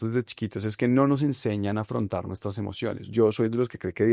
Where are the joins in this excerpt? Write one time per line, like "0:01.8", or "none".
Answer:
none